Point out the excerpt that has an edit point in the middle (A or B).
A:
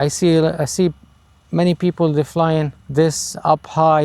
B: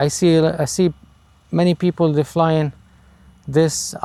A